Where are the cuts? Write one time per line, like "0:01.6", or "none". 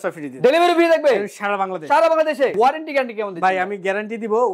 0:02.5